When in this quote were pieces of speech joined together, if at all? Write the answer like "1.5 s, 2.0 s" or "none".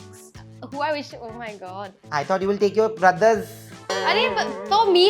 2.0 s

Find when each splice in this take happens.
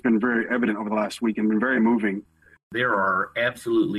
2.7 s

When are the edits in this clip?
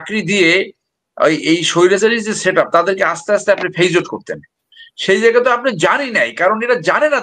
none

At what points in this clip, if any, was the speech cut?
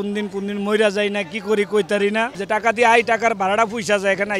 2.4 s

